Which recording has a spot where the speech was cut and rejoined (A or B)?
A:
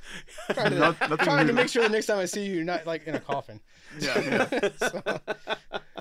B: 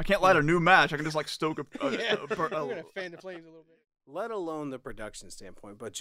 B